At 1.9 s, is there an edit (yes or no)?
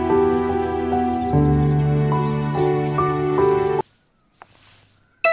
no